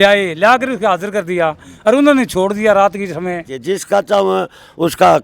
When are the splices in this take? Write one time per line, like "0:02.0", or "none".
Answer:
0:03.5